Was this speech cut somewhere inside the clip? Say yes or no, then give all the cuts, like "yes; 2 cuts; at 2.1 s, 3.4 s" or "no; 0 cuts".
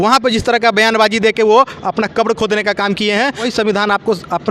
yes; 1 cut; at 3.5 s